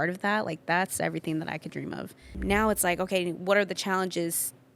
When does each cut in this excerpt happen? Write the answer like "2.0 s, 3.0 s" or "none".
2.3 s